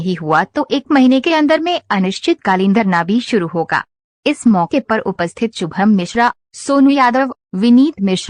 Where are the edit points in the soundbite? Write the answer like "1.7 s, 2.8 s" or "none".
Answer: none